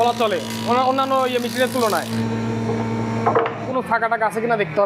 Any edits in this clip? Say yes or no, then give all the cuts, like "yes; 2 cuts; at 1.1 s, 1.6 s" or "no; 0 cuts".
yes; 2 cuts; at 2.1 s, 3.7 s